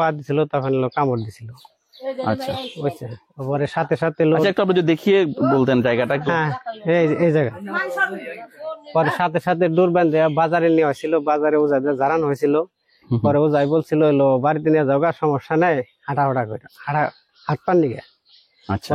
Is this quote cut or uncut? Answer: uncut